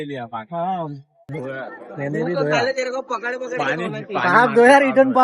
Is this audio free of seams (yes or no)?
no